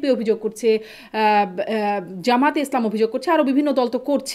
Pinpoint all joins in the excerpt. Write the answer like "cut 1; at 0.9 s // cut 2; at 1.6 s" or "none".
none